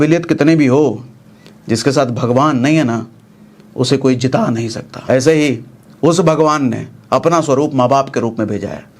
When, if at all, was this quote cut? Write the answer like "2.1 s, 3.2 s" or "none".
4.9 s